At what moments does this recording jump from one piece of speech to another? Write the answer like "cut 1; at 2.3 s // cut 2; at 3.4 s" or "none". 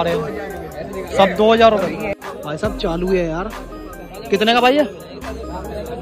cut 1; at 2.1 s